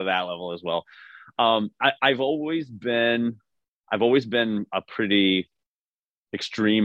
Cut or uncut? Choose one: uncut